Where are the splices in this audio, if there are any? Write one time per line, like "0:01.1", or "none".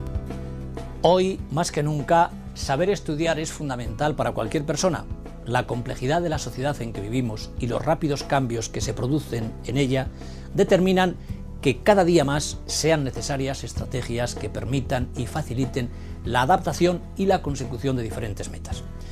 none